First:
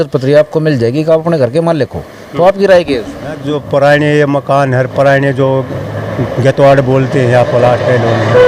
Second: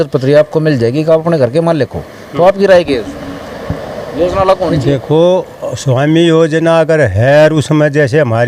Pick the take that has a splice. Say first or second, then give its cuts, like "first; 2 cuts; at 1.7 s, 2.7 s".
first; 1 cut; at 3.5 s